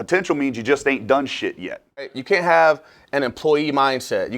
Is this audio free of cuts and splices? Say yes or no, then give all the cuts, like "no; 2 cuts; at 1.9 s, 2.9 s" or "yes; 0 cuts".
no; 1 cut; at 2.2 s